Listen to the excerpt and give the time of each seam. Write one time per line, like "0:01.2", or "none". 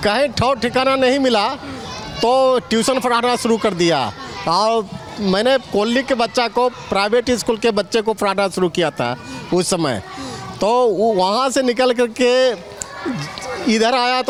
none